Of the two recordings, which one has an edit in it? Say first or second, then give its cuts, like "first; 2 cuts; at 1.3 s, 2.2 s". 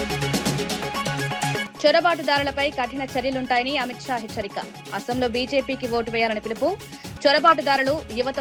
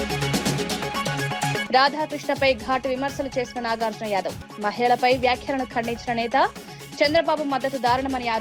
second; 1 cut; at 1.6 s